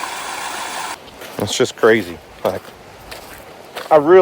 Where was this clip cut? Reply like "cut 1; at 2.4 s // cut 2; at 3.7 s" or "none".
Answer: cut 1; at 1.0 s